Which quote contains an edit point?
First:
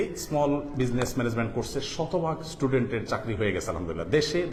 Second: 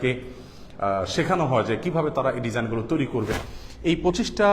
second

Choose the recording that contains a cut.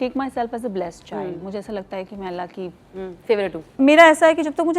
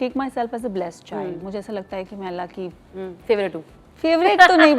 first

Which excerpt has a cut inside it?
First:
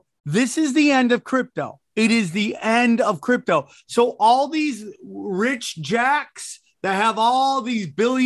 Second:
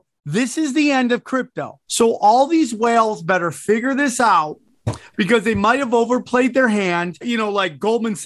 second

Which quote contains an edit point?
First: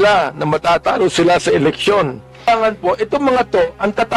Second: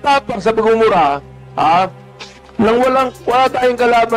first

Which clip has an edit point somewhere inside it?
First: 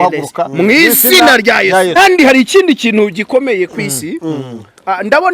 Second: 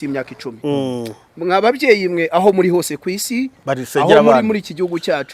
first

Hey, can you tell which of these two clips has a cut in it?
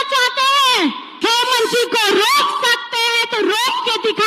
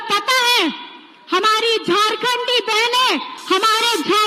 first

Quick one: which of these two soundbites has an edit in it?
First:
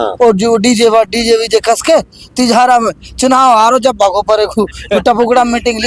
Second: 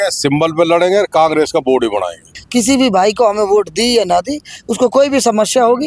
second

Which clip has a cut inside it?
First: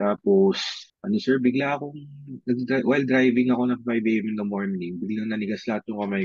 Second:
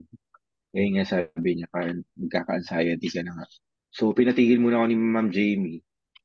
second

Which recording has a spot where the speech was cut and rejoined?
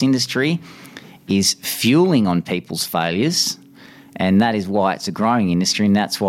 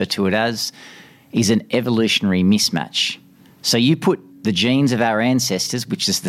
second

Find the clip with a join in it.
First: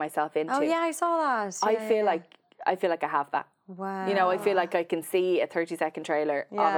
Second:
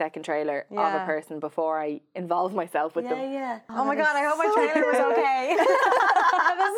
second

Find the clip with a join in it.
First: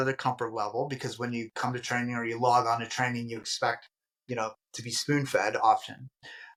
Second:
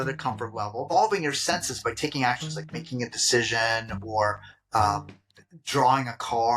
second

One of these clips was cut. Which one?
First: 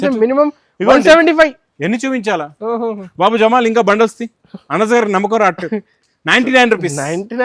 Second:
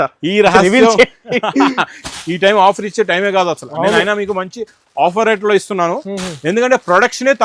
second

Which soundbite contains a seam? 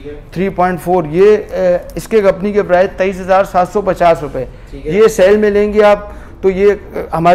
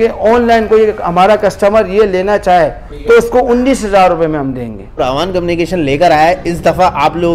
second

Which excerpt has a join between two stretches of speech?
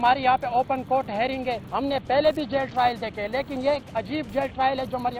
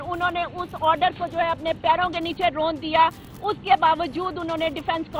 first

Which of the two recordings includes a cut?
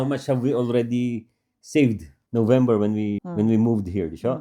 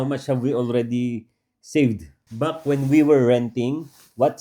second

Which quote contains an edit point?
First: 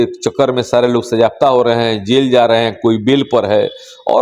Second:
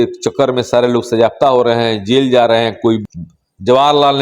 second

